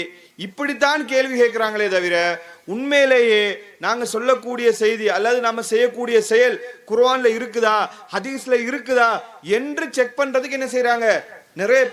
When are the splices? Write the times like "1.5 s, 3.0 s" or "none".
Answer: none